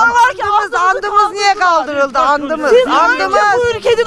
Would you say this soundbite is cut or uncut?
uncut